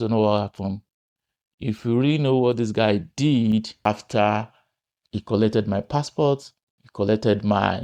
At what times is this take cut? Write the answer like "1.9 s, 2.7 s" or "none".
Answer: 3.9 s